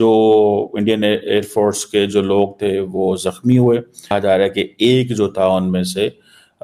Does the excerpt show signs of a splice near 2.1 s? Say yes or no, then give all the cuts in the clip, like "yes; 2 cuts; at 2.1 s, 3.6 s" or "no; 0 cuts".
no; 1 cut; at 4.1 s